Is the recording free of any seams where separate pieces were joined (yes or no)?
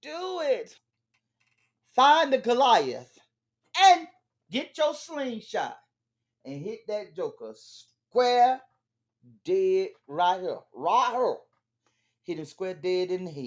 no